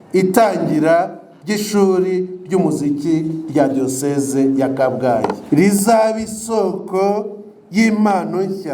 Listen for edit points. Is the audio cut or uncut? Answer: cut